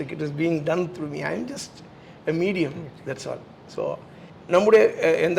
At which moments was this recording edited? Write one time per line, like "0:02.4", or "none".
none